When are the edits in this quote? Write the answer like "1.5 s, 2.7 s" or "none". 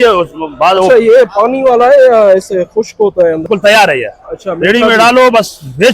3.5 s